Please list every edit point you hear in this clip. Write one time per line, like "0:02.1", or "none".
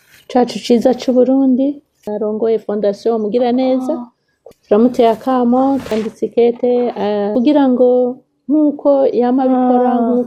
0:02.1
0:04.3
0:07.3